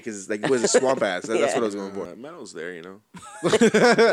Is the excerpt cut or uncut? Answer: cut